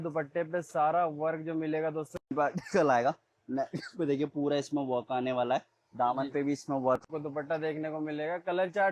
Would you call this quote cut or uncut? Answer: cut